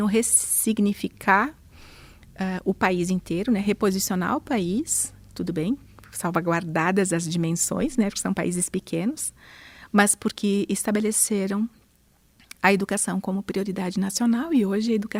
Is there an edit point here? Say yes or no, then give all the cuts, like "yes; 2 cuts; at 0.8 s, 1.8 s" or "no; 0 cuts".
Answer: no; 0 cuts